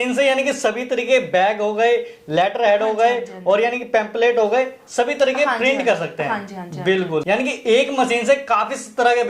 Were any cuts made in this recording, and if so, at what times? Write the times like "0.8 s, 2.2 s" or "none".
7.2 s